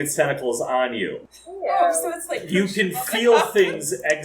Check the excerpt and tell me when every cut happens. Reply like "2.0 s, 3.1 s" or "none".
1.2 s

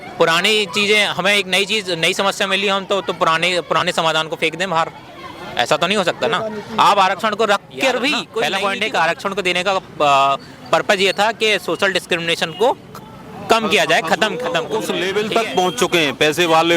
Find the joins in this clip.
8.3 s, 14.7 s

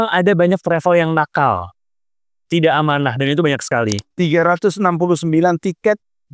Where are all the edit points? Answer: 4.1 s

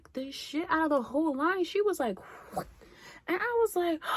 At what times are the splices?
3.0 s

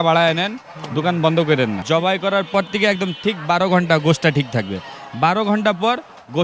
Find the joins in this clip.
1.8 s

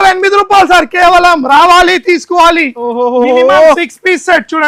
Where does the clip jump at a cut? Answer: none

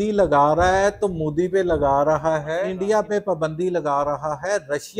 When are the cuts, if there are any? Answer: 2.7 s

